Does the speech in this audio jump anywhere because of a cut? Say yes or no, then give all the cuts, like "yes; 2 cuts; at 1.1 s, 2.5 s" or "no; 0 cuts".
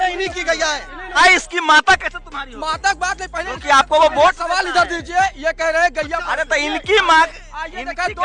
yes; 1 cut; at 1.2 s